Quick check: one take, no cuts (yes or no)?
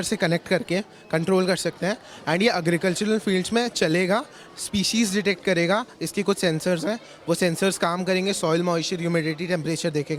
yes